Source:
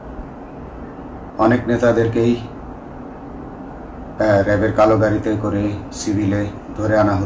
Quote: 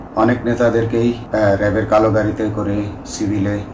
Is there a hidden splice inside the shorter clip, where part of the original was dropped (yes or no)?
yes